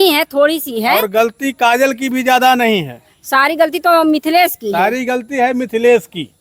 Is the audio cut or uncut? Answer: uncut